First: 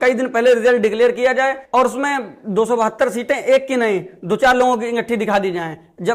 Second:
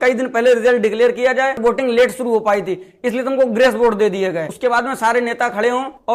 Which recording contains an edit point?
second; 2 cuts; at 1.6 s, 4.5 s

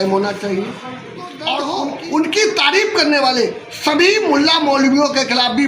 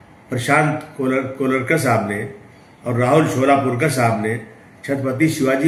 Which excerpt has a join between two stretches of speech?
first; 1 cut; at 1.5 s

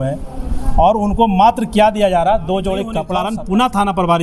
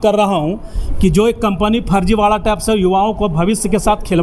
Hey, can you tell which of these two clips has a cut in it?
first; 1 cut; at 3.0 s

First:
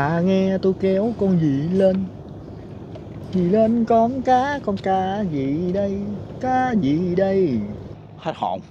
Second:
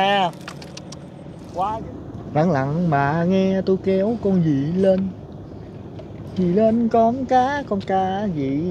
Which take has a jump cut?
second; 1 cut; at 1.5 s

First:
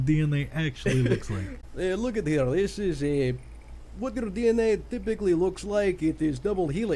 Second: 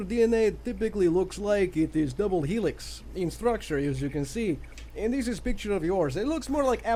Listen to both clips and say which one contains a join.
first; 1 cut; at 1.5 s

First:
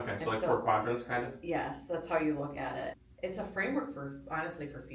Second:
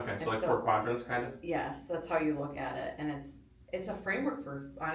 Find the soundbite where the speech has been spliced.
first; 1 cut; at 2.9 s

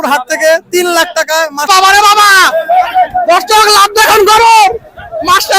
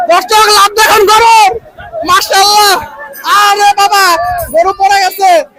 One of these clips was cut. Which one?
first; 1 cut; at 1.6 s

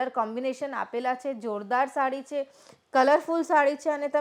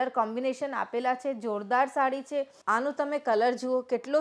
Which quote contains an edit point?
second; 1 cut; at 2.6 s

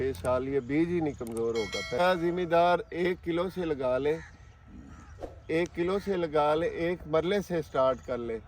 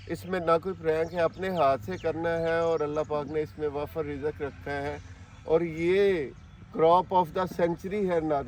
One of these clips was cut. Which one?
first; 1 cut; at 2.0 s

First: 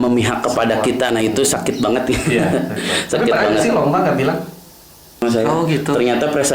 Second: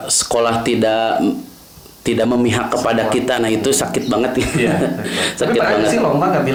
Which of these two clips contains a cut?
first; 1 cut; at 5.2 s

